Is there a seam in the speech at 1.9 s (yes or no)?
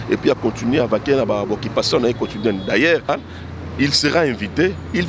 no